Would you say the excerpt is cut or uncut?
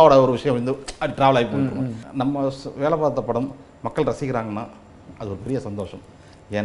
cut